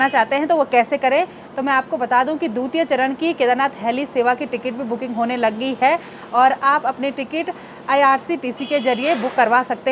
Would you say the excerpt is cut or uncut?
uncut